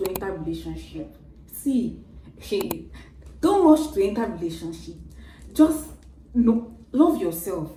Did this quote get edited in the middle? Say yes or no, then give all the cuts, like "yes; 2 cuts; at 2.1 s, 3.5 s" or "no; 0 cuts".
no; 0 cuts